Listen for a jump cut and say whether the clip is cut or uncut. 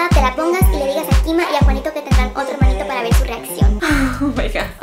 uncut